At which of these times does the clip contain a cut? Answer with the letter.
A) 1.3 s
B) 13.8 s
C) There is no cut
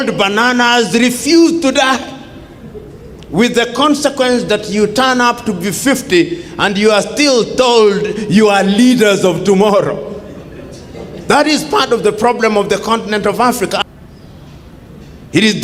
B